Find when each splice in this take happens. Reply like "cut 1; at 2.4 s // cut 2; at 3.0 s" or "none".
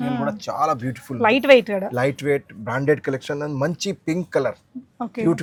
none